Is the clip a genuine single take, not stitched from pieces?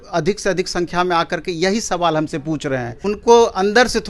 no; 1 cut; at 2.9 s

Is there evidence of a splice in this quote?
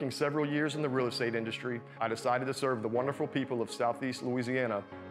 no; 0 cuts

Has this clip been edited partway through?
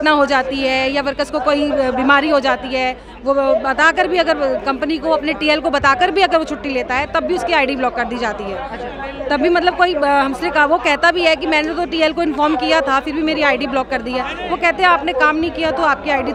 no; 0 cuts

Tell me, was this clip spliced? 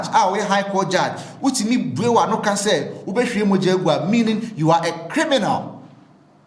no; 0 cuts

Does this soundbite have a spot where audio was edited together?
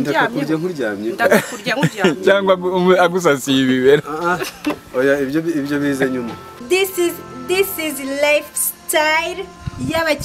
yes; 1 cut; at 6.5 s

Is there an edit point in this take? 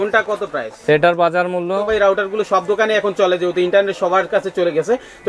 yes; 1 cut; at 1.9 s

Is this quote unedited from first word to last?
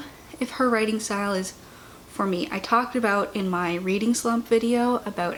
yes; 0 cuts

